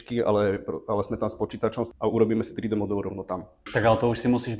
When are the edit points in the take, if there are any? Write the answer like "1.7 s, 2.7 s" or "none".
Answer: 1.9 s, 3.7 s